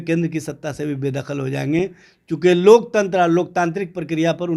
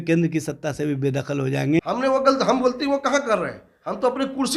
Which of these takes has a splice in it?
second; 1 cut; at 1.8 s

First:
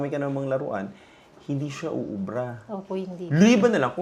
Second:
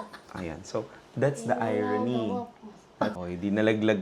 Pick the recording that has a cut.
second; 1 cut; at 3.1 s

